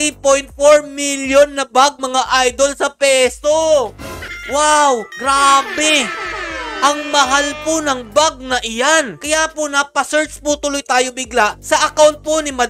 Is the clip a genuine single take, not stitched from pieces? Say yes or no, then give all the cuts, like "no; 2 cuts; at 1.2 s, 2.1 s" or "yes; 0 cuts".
yes; 0 cuts